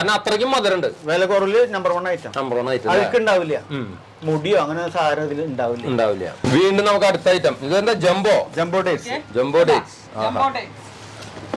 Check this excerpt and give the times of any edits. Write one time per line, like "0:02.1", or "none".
none